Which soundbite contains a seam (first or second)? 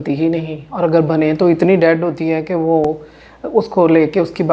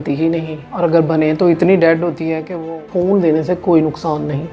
second